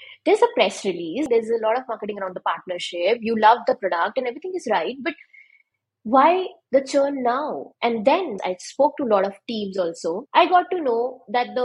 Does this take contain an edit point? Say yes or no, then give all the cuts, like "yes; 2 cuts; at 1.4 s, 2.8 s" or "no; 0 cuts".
yes; 3 cuts; at 1.3 s, 8.3 s, 10.2 s